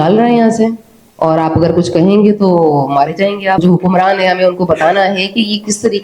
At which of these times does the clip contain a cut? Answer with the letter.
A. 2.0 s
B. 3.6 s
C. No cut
B